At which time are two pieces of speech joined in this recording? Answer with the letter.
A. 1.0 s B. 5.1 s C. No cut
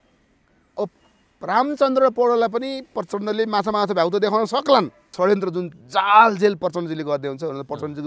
B